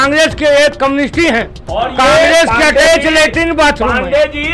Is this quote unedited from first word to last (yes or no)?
yes